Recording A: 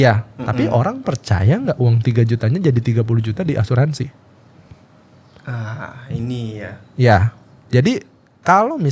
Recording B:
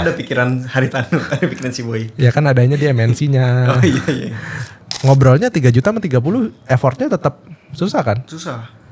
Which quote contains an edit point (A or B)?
B